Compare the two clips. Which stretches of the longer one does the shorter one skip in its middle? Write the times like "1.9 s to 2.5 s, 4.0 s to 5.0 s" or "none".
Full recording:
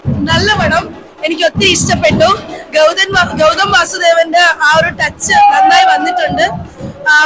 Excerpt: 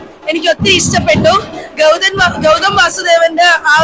none